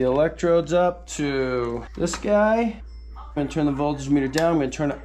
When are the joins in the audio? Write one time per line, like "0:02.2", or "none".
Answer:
0:01.9
0:03.4

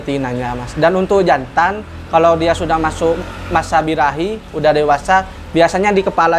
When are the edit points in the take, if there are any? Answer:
none

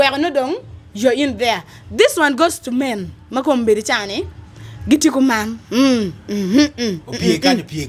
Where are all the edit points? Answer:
none

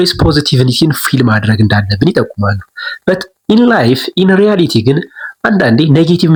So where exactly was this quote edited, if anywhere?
none

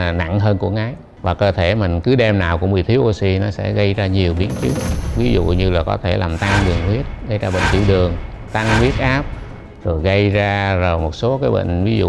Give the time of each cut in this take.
0:01.1

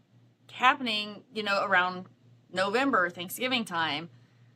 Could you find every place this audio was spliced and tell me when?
none

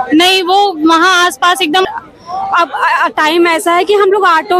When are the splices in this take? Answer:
0:01.9

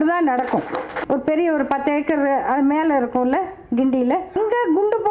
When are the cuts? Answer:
0:00.9
0:04.3

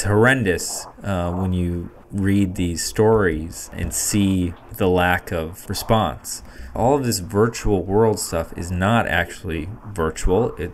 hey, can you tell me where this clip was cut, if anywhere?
0:03.9
0:04.6
0:05.5
0:06.6

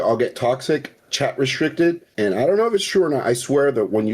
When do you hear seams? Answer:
0:02.1

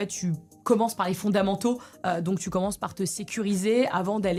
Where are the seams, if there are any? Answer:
none

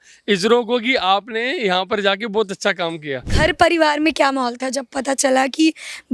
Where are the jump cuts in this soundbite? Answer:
0:03.2

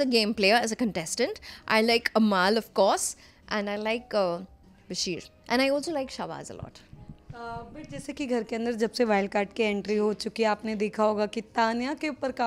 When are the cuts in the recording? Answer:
none

